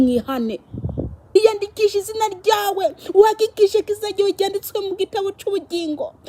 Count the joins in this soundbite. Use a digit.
1